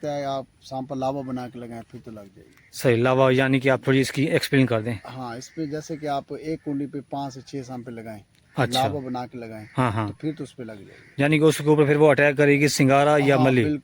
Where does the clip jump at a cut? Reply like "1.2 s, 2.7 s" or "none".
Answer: none